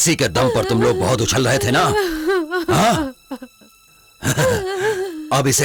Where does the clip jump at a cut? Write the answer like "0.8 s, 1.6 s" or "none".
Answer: none